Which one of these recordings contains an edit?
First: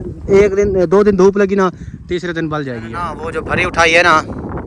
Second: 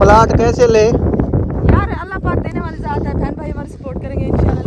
first; 1 cut; at 2.9 s

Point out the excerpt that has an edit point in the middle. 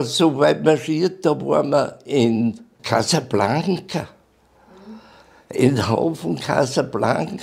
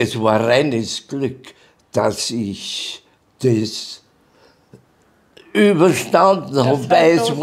first; 1 cut; at 2.7 s

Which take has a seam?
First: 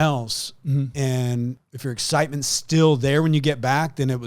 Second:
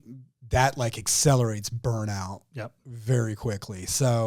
first; 1 cut; at 1.6 s

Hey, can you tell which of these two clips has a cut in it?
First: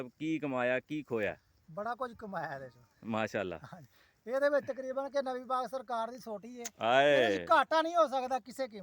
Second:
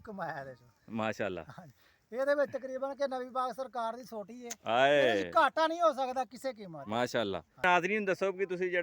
second; 1 cut; at 7.6 s

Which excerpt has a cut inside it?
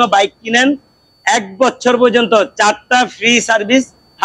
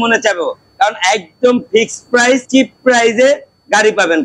second; 1 cut; at 2.4 s

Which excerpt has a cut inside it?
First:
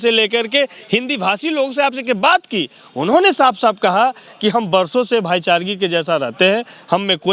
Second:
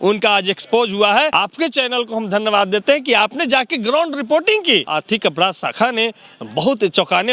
second; 2 cuts; at 1.3 s, 4.9 s

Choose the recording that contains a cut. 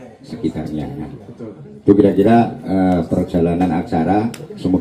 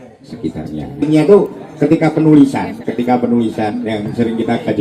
second; 1 cut; at 1.0 s

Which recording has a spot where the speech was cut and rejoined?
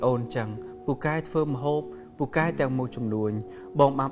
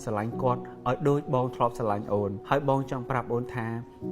second; 1 cut; at 2.4 s

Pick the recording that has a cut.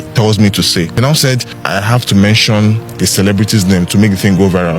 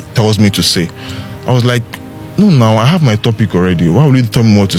first; 2 cuts; at 1.3 s, 2.9 s

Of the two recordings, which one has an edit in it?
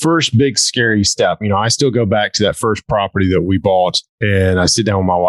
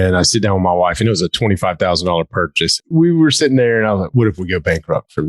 second; 1 cut; at 2.8 s

